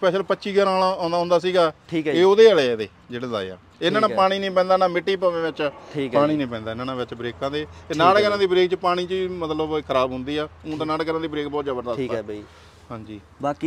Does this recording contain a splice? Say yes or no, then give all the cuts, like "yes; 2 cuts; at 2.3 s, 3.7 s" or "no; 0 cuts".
no; 0 cuts